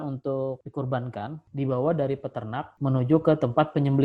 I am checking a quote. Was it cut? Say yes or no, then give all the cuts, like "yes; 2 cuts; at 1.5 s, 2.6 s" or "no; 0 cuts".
yes; 2 cuts; at 1.4 s, 2.7 s